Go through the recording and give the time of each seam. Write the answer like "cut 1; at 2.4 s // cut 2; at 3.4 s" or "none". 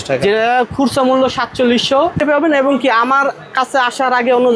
cut 1; at 2.2 s

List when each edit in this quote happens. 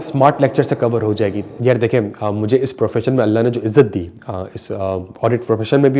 none

